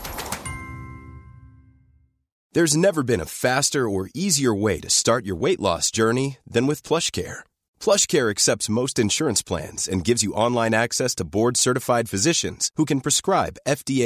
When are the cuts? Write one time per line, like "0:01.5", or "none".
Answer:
0:02.3